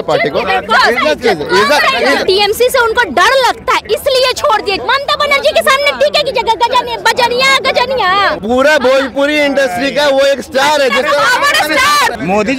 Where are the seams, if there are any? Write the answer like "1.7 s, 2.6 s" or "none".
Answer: 2.2 s, 4.8 s